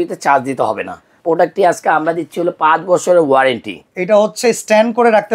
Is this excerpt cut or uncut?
cut